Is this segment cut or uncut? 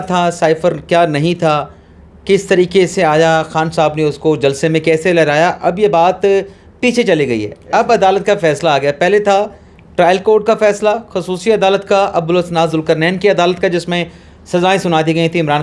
uncut